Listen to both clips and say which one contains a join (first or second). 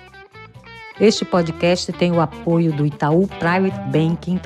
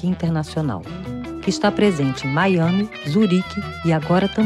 first